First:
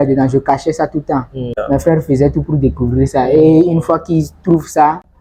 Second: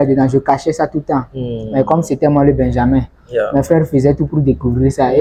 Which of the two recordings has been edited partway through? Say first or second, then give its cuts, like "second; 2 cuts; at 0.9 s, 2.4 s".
first; 1 cut; at 1.6 s